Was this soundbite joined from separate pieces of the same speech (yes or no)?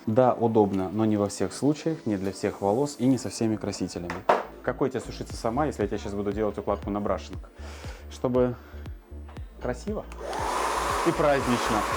yes